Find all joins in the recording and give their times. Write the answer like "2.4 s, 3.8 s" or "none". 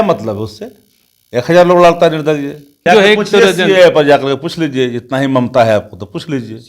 2.8 s